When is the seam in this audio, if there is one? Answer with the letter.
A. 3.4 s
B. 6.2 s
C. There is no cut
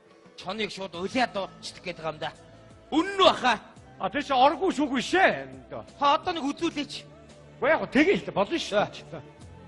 A